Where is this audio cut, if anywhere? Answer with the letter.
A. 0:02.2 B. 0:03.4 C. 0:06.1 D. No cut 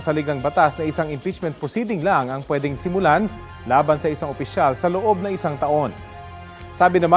A